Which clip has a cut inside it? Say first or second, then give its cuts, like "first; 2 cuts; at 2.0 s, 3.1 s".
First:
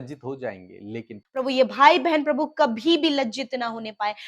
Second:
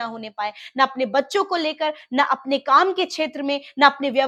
first; 1 cut; at 1.4 s